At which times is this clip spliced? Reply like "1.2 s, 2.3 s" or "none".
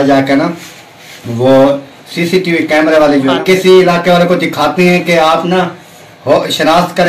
3.4 s